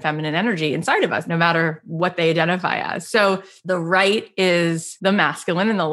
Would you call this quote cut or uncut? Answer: cut